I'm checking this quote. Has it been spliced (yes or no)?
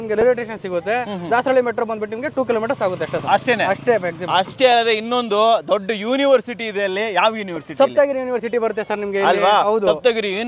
no